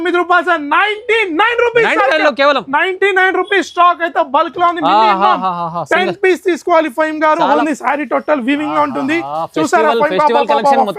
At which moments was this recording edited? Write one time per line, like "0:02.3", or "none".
0:07.6